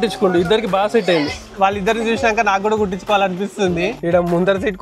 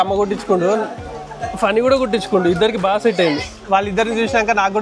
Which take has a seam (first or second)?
first